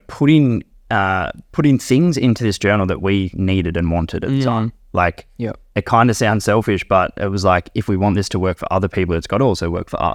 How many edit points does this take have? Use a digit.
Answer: 0